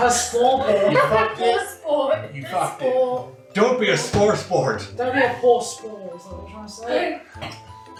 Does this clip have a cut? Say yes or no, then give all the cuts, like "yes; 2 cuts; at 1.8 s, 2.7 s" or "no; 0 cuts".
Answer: no; 0 cuts